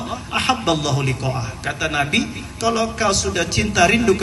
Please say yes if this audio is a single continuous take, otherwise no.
yes